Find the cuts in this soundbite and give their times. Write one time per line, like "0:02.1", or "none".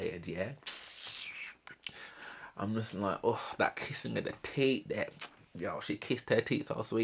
none